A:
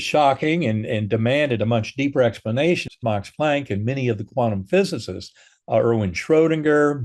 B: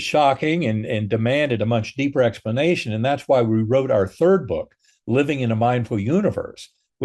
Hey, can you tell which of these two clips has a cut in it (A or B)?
A